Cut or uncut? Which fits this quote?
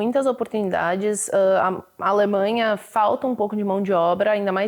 uncut